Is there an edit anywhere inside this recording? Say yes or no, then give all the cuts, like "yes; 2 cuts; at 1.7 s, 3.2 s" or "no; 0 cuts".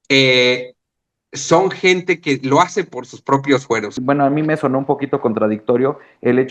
yes; 1 cut; at 3.9 s